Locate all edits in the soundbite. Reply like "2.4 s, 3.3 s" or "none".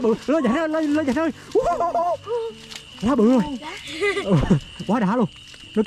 none

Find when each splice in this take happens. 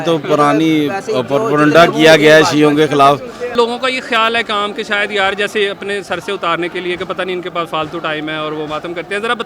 3.5 s

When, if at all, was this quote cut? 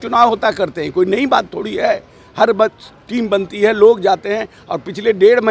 none

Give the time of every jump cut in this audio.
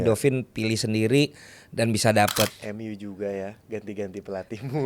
2.5 s

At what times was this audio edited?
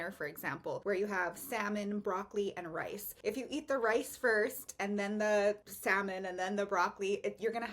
0.8 s, 3.0 s, 5.7 s

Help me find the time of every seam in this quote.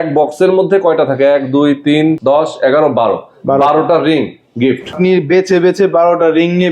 2.2 s, 4.9 s

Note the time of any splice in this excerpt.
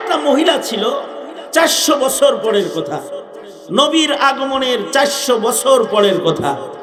none

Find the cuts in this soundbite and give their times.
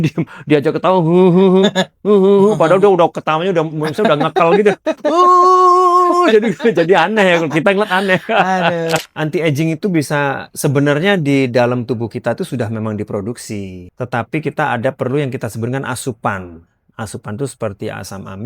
9.0 s, 13.8 s

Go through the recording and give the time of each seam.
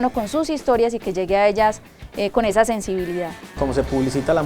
3.5 s

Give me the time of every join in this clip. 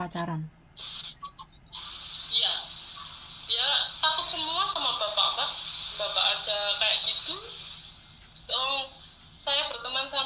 none

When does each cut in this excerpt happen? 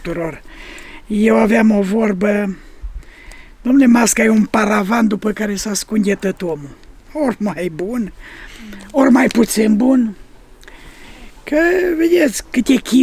none

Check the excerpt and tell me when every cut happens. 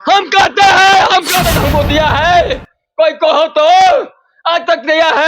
1.4 s

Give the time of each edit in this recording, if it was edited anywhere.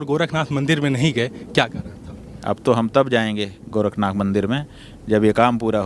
2.3 s, 4.6 s

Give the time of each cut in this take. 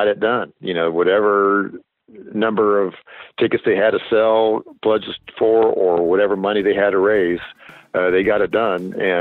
none

